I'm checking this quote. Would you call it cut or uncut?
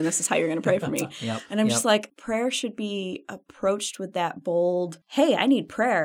cut